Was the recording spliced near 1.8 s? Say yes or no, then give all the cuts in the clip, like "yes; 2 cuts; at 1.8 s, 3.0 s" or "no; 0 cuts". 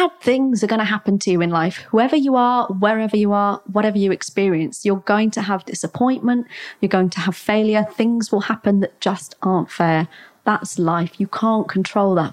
yes; 1 cut; at 1.8 s